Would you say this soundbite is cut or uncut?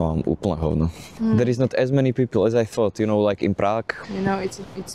cut